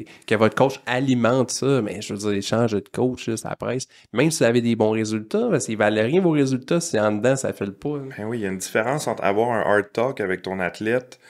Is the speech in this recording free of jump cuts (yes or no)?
yes